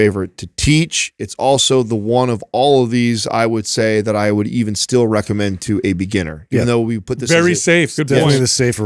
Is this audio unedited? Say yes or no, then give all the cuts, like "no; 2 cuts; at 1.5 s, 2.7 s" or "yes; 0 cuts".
yes; 0 cuts